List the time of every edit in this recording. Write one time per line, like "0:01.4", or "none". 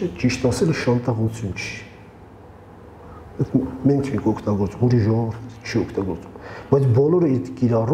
none